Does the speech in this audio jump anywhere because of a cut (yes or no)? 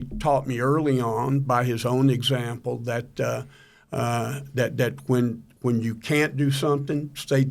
no